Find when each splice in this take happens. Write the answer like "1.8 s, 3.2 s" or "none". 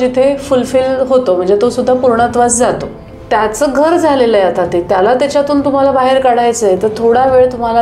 3.1 s